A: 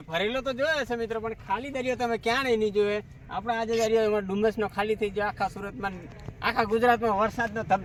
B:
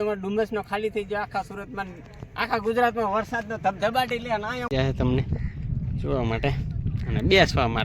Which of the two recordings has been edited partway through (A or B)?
B